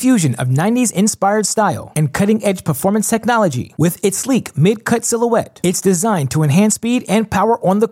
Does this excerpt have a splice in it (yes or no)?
no